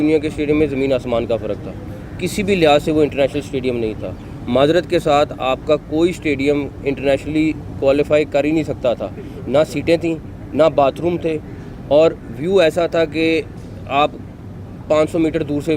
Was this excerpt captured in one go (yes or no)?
yes